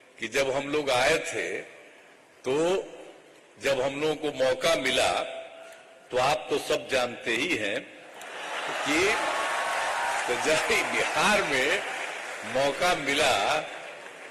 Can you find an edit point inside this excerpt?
no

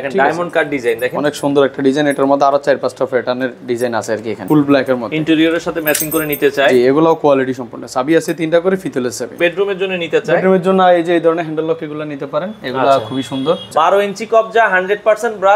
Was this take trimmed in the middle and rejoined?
yes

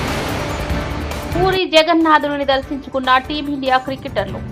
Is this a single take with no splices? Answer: yes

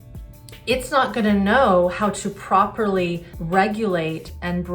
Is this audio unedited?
no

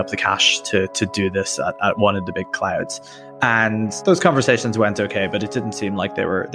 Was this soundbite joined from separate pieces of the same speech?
no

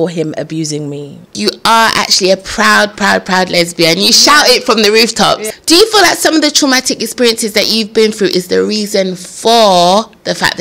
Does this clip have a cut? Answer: yes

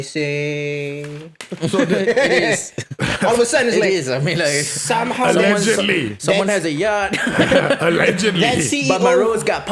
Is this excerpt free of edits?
yes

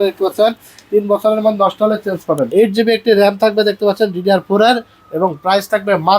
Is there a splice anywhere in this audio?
yes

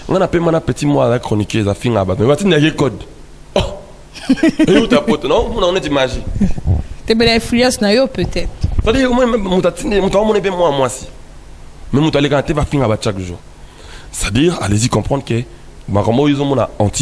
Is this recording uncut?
yes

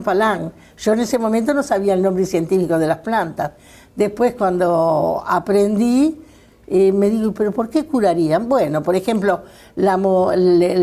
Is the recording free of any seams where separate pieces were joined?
yes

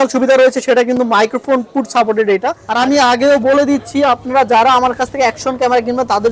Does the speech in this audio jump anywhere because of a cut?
yes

